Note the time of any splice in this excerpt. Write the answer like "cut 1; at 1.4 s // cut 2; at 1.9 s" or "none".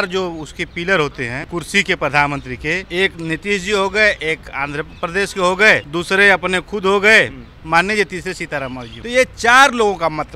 cut 1; at 1.4 s // cut 2; at 2.8 s // cut 3; at 5.9 s // cut 4; at 8.9 s